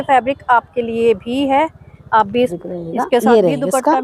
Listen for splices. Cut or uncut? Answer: cut